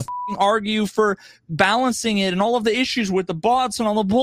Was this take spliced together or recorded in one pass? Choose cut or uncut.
uncut